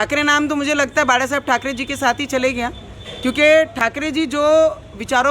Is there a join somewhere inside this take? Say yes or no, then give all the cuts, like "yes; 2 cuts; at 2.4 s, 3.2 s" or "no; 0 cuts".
no; 0 cuts